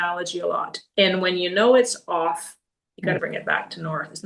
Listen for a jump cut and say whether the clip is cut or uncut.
cut